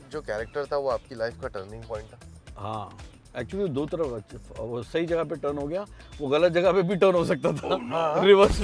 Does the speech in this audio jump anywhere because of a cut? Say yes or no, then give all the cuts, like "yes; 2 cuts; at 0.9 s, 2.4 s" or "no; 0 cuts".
no; 0 cuts